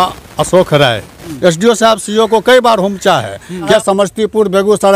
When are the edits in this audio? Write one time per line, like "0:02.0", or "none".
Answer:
0:01.2
0:03.7